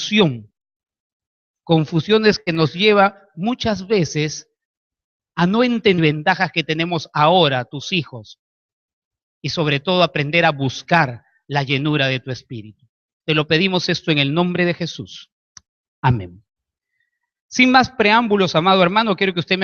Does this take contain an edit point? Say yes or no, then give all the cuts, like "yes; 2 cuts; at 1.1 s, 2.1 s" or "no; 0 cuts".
no; 0 cuts